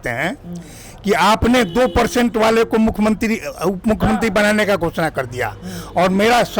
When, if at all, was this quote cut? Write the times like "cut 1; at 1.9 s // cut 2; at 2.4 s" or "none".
none